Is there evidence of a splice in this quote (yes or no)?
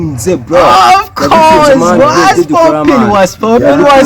yes